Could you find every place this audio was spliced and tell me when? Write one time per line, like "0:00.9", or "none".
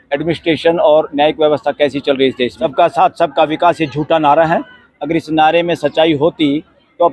0:02.6